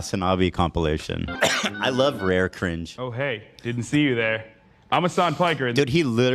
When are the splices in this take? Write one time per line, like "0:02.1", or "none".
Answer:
0:01.3